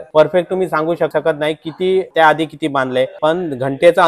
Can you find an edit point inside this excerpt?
yes; 2 cuts; at 1.1 s, 2.1 s

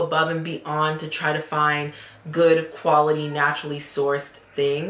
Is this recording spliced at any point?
no; 0 cuts

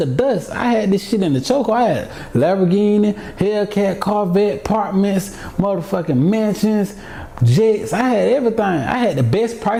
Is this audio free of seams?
yes; 0 cuts

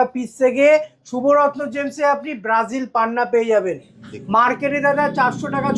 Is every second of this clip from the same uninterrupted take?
yes; 0 cuts

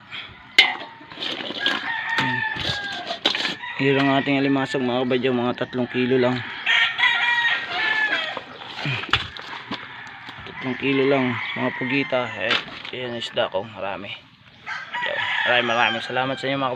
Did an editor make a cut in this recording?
no; 0 cuts

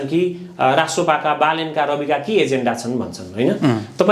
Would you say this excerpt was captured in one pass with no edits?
yes; 0 cuts

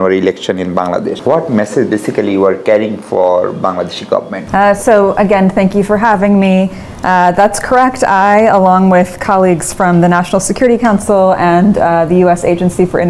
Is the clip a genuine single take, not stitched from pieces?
no; 2 cuts; at 1.2 s, 4.4 s

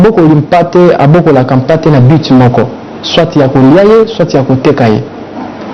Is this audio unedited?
yes; 0 cuts

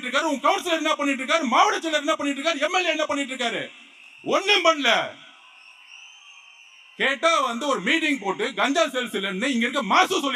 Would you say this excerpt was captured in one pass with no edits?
yes; 0 cuts

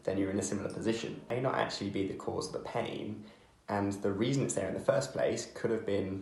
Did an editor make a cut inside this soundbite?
yes; 1 cut; at 1.3 s

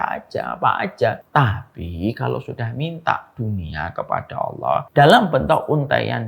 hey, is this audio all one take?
no; 2 cuts; at 1.2 s, 4.9 s

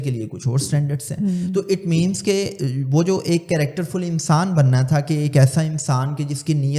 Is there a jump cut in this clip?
no; 0 cuts

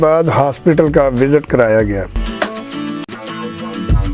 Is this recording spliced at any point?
yes; 1 cut; at 3.1 s

